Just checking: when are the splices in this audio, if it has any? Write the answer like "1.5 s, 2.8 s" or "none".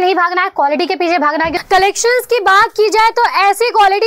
1.6 s